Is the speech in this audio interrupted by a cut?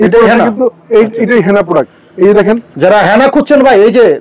no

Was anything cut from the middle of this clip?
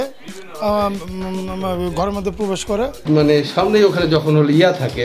yes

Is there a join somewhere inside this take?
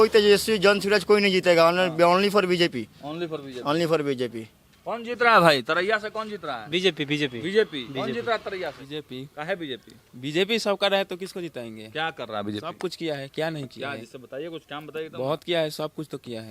no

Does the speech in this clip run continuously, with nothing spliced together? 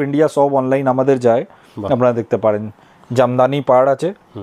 yes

